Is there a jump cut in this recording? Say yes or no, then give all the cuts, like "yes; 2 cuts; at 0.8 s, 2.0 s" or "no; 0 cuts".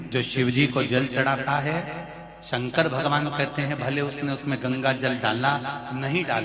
no; 0 cuts